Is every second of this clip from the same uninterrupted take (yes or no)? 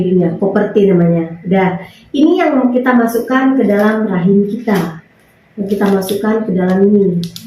yes